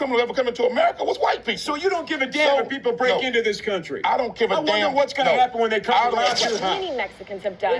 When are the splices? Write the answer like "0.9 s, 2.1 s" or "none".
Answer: 6.8 s